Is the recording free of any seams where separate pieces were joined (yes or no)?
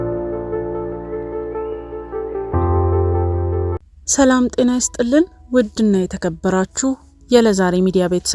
no